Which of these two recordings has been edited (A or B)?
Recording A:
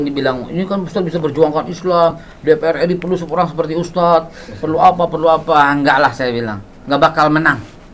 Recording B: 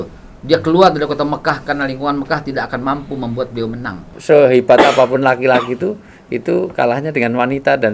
B